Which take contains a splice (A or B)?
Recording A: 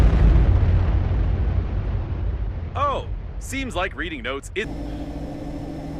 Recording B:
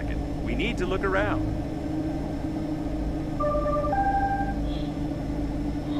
A